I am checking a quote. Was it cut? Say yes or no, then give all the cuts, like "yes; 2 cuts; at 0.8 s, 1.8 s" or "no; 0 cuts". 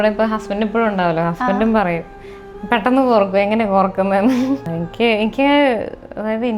yes; 1 cut; at 4.7 s